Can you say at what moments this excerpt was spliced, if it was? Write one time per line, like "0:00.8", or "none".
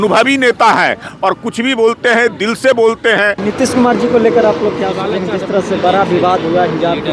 0:03.4